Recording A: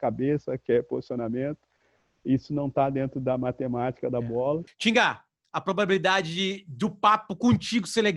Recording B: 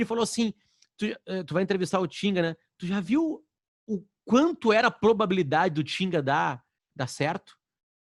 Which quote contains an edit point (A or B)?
A